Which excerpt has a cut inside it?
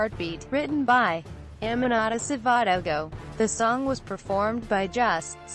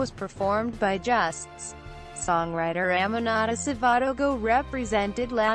second; 1 cut; at 2.6 s

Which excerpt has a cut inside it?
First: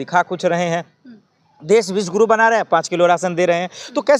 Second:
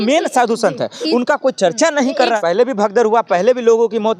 second; 1 cut; at 2.4 s

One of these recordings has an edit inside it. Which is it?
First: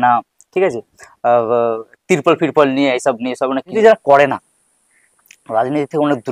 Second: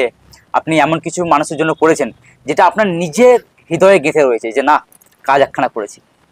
first; 1 cut; at 3.7 s

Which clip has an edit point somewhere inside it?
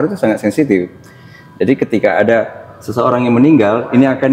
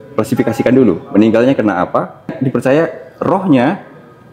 second; 1 cut; at 2.4 s

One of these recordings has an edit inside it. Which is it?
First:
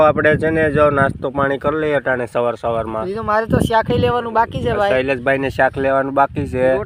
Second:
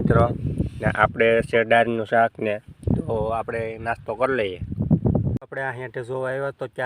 second; 1 cut; at 5.4 s

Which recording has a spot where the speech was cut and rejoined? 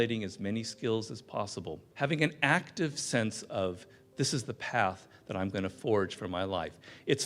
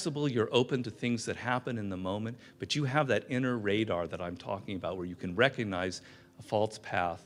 first; 1 cut; at 1.9 s

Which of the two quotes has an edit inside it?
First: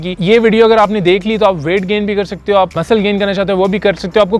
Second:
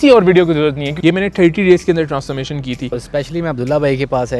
second; 2 cuts; at 0.9 s, 2.9 s

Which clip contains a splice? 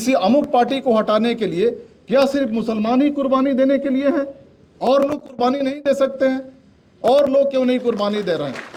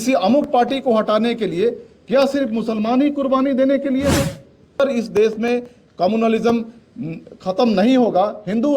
second; 1 cut; at 4.8 s

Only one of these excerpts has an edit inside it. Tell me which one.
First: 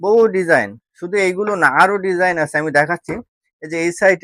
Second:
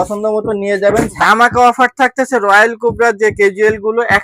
second; 1 cut; at 1.1 s

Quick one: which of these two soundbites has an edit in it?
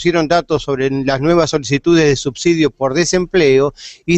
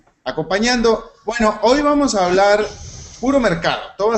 first; 1 cut; at 3.2 s

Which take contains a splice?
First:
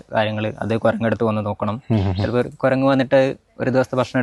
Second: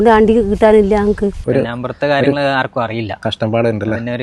second; 1 cut; at 1.4 s

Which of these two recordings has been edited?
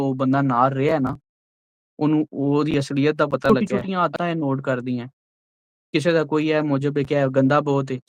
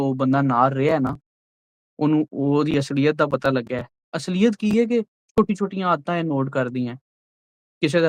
first; 1 cut; at 3.5 s

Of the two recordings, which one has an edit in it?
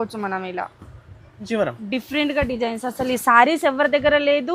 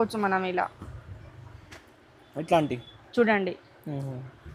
first; 1 cut; at 1.5 s

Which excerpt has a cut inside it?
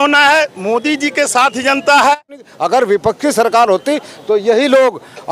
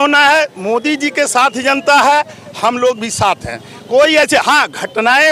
first; 1 cut; at 2.5 s

